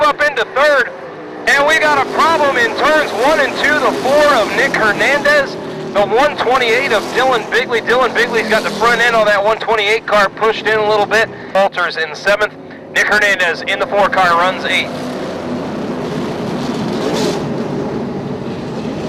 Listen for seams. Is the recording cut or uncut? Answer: uncut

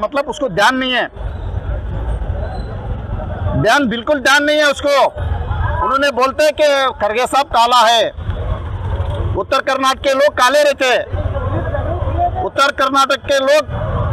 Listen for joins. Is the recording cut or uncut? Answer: uncut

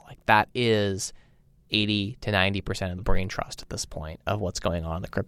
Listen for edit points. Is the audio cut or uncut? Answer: cut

